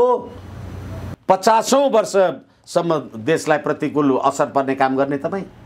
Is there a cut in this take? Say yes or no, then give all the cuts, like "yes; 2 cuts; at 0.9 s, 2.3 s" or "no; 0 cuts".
yes; 1 cut; at 1.0 s